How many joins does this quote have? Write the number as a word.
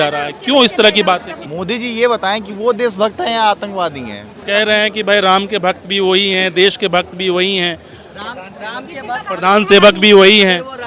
two